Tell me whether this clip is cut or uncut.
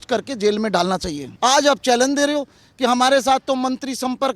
cut